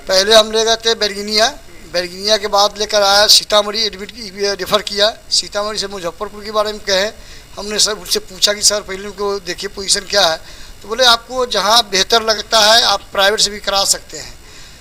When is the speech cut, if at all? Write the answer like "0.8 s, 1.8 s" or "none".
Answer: none